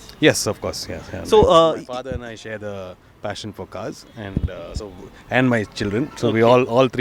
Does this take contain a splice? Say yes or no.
no